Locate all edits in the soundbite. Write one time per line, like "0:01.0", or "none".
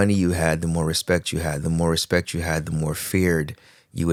none